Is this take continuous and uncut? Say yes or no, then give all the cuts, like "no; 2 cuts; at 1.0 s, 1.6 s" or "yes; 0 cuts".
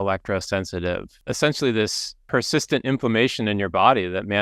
no; 2 cuts; at 1.1 s, 2.1 s